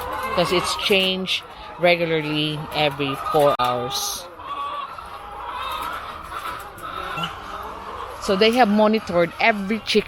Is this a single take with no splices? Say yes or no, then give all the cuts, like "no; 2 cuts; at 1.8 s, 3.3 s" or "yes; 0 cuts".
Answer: no; 1 cut; at 7.2 s